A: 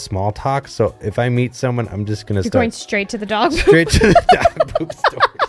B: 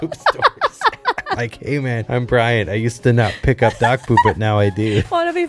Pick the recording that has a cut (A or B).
B